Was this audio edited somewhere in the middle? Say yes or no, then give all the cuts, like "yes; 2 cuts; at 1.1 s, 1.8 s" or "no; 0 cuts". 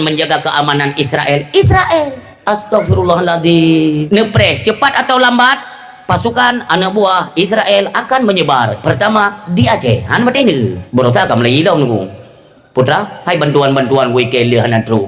yes; 3 cuts; at 2.3 s, 4.0 s, 10.8 s